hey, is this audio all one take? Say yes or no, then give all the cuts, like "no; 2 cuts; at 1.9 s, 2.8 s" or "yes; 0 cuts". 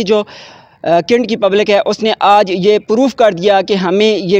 yes; 0 cuts